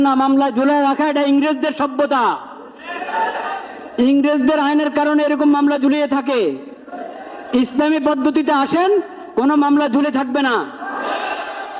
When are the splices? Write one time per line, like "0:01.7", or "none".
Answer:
none